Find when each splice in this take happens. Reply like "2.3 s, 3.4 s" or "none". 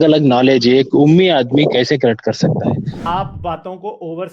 3.0 s